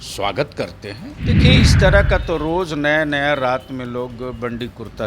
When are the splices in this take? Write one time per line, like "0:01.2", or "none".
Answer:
0:01.4